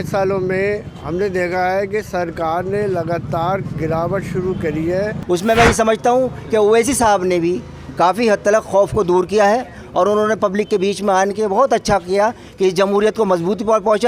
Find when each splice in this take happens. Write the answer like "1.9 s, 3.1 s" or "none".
5.2 s